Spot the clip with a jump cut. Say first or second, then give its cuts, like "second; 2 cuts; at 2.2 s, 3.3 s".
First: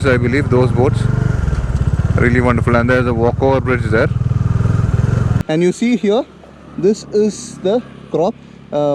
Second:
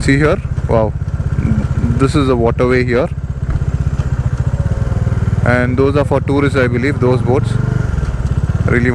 first; 1 cut; at 5.4 s